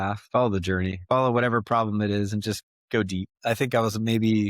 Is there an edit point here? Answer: yes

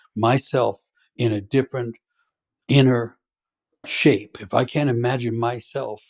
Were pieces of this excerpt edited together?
yes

